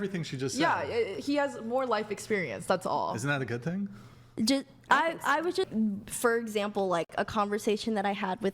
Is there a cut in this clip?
yes; 1 cut; at 5.7 s

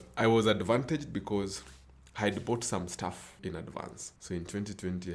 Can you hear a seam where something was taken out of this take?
no; 0 cuts

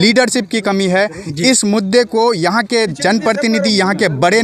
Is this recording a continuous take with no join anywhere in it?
yes; 0 cuts

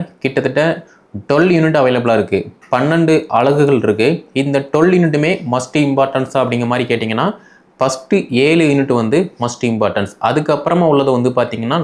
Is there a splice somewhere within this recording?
no; 0 cuts

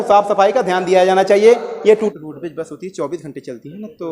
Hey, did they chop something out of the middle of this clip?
yes; 1 cut; at 1.9 s

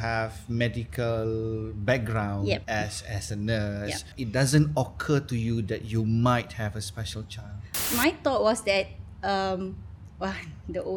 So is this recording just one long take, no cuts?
no; 3 cuts; at 2.6 s, 4.1 s, 7.7 s

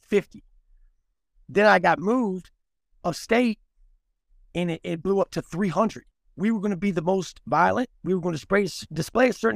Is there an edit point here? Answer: yes; 1 cut; at 6.0 s

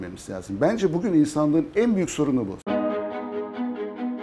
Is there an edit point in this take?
no; 0 cuts

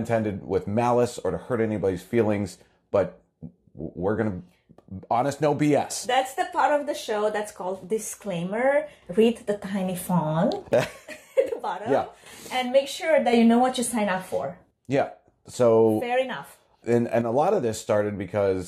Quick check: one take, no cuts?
yes; 0 cuts

